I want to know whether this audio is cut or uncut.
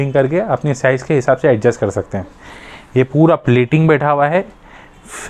uncut